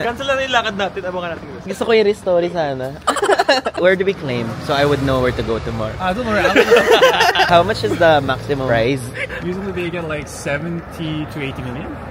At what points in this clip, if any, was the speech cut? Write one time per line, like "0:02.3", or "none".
0:03.8
0:07.5